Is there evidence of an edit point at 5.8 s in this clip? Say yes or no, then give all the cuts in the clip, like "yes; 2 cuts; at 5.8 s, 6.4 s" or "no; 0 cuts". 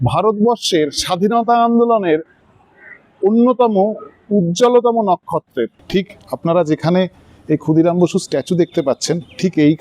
yes; 1 cut; at 5.8 s